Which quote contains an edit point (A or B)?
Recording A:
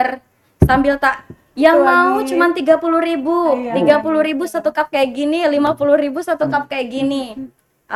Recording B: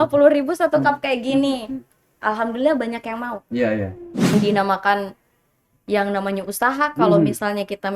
B